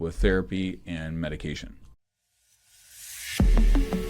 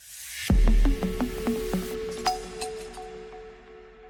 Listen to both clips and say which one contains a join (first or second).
first